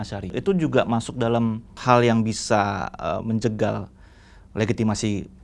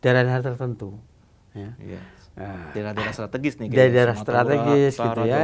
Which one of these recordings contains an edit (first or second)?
first